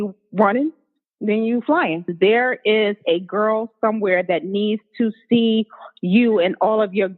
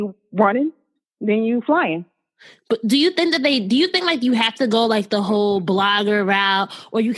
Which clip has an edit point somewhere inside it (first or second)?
first